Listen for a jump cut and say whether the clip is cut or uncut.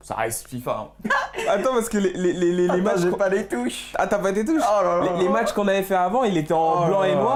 uncut